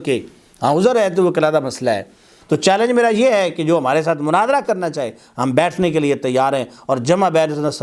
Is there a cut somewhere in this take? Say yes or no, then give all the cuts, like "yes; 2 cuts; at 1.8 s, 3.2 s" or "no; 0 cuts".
yes; 1 cut; at 2.3 s